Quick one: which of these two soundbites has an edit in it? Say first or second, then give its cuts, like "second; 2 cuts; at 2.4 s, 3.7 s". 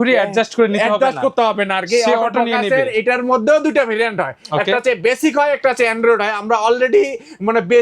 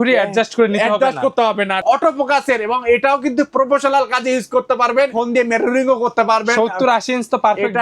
second; 2 cuts; at 1.8 s, 5.1 s